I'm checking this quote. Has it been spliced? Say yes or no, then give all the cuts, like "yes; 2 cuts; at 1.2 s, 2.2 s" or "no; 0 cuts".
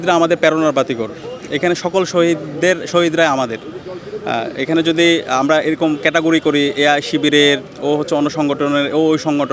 no; 0 cuts